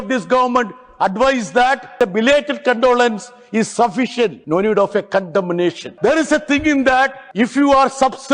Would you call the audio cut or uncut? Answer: cut